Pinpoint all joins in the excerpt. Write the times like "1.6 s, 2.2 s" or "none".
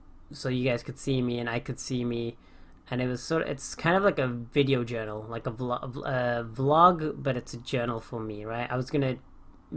5.2 s